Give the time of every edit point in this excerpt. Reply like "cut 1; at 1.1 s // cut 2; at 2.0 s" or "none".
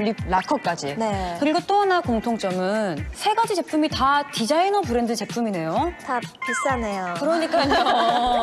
cut 1; at 5.7 s